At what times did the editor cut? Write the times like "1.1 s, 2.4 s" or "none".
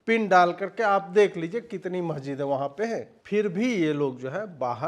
3.1 s